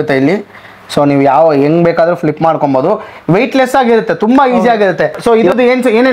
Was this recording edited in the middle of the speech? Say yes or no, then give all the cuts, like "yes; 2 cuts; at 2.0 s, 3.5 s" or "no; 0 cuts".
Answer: yes; 1 cut; at 5.2 s